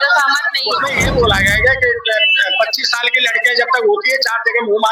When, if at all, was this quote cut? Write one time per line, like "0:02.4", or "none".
0:00.9